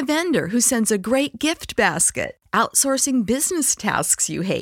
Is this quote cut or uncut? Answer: uncut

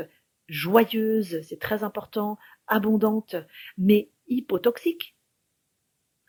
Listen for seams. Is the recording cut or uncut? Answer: uncut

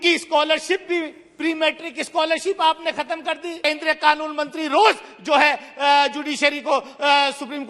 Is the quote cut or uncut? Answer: cut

